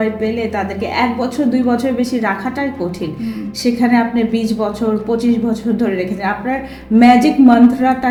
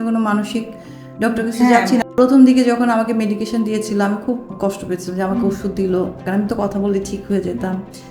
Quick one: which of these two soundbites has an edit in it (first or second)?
second